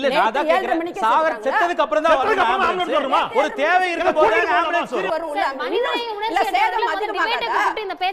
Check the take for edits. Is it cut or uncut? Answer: cut